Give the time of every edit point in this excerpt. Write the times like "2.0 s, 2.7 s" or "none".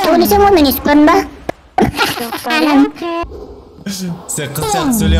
3.2 s